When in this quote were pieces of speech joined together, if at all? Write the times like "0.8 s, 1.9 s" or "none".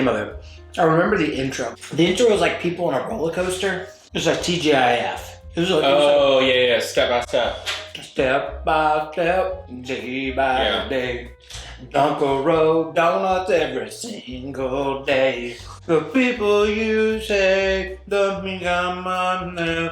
1.7 s